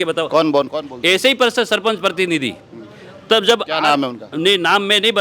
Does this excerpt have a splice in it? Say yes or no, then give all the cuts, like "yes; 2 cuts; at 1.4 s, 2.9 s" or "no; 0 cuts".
no; 0 cuts